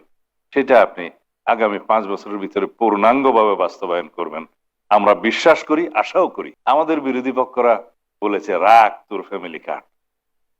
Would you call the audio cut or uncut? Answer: cut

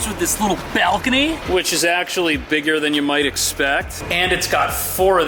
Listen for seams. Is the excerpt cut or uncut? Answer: uncut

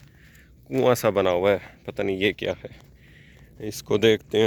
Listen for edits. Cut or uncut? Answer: uncut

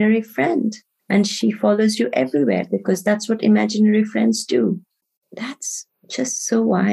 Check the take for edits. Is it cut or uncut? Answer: cut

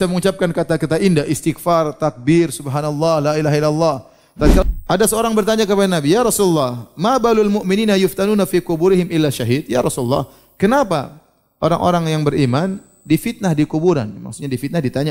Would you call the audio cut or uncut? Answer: cut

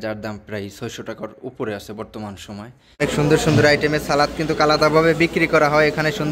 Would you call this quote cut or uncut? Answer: cut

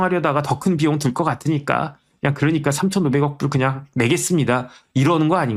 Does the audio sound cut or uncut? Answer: uncut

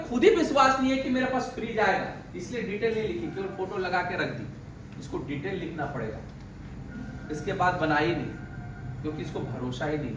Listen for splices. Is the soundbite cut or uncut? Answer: uncut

